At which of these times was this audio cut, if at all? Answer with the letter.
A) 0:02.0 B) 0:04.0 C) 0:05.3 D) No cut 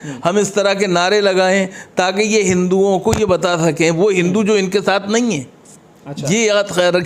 D